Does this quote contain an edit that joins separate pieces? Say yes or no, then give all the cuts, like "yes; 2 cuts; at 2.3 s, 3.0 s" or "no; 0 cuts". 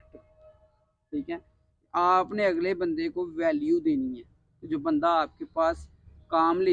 no; 0 cuts